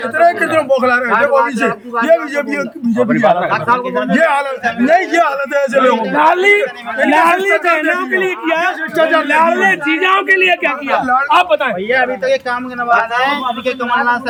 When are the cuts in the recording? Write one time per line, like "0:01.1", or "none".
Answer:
none